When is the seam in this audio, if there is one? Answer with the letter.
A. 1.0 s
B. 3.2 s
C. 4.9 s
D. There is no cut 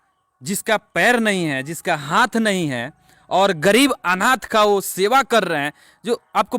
D